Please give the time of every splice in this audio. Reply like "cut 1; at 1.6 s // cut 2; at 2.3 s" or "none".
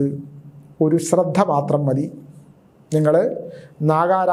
none